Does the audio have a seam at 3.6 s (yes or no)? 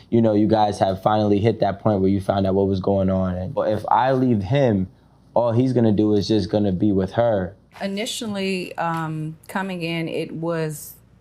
yes